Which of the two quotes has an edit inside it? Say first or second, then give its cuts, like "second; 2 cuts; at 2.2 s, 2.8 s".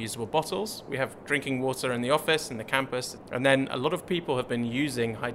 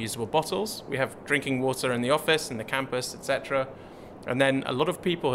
first; 1 cut; at 3.1 s